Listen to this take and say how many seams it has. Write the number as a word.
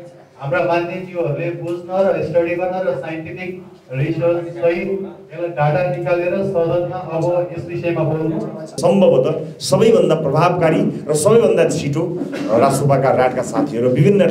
one